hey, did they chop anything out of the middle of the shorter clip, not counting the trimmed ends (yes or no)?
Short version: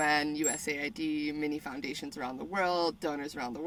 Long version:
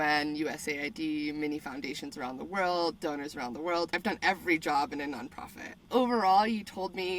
no